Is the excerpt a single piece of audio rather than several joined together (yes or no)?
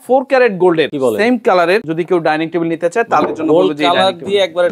no